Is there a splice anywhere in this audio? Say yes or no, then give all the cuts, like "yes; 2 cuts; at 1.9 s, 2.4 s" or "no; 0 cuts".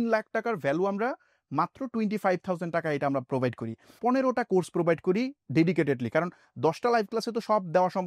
no; 0 cuts